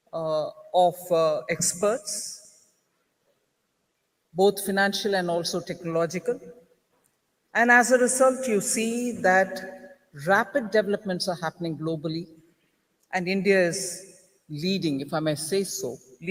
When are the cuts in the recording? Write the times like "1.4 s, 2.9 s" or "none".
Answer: none